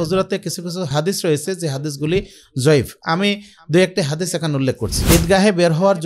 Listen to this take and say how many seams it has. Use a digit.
2